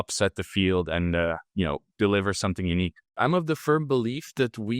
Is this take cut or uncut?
cut